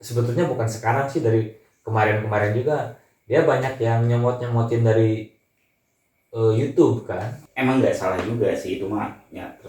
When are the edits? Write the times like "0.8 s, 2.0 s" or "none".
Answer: 7.4 s